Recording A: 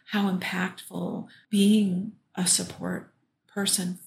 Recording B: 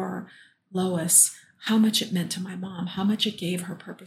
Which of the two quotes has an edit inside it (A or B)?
A